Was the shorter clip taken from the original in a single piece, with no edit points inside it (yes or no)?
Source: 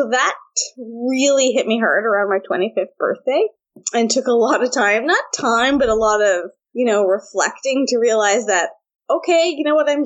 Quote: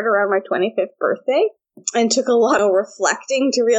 no